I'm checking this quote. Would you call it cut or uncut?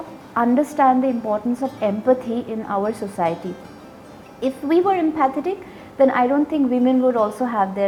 uncut